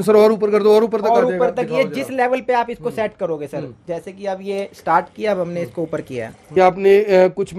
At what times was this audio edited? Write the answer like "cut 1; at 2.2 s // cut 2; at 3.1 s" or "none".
cut 1; at 6.4 s

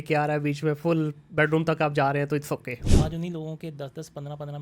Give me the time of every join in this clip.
cut 1; at 2.8 s

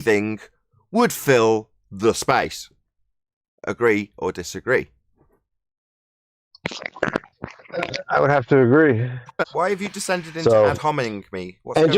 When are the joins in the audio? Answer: cut 1; at 9.3 s

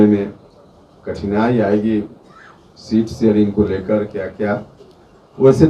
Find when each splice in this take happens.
none

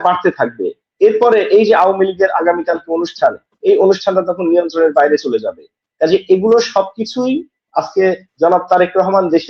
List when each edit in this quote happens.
none

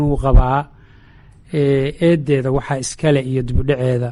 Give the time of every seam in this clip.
none

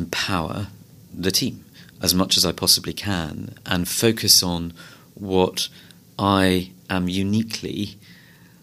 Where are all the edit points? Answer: none

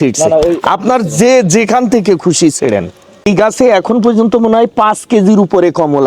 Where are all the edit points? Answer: cut 1; at 3.3 s

